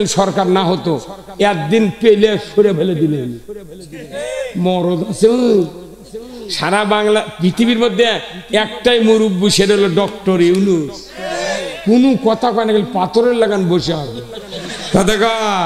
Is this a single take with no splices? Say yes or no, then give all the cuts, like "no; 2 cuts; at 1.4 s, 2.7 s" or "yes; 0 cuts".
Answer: yes; 0 cuts